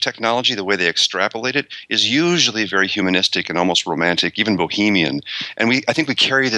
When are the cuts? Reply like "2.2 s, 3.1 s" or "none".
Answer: none